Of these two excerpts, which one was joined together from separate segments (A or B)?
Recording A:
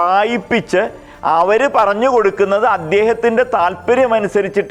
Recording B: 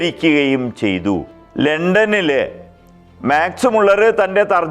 B